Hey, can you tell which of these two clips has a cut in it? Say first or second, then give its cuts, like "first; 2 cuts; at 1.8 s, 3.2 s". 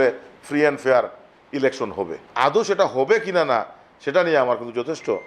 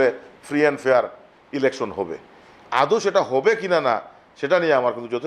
first; 1 cut; at 2.2 s